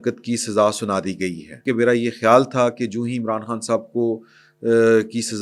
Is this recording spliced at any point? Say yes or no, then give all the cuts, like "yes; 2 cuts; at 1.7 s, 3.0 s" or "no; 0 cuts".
yes; 1 cut; at 1.6 s